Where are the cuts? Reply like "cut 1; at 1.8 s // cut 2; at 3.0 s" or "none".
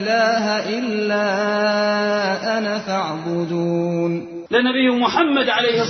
cut 1; at 4.5 s